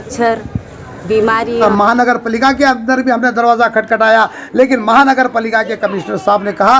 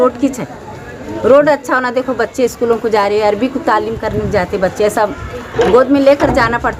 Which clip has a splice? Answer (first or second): first